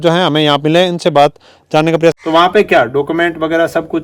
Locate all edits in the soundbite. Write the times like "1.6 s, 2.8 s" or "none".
2.2 s